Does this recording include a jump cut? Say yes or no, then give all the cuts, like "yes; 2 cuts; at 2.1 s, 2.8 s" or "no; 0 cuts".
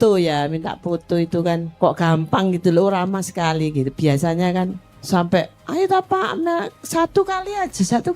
yes; 3 cuts; at 1.7 s, 4.9 s, 5.6 s